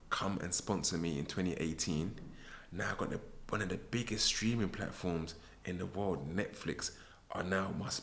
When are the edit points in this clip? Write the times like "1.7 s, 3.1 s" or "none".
none